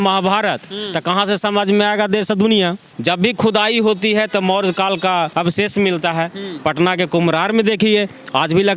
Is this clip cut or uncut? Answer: cut